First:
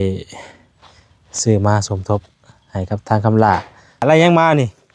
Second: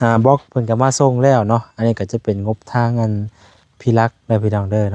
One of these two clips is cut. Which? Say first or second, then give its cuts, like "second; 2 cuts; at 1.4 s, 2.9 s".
first; 1 cut; at 4.0 s